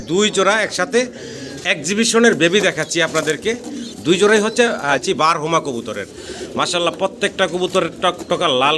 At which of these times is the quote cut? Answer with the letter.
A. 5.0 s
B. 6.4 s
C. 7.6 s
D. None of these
A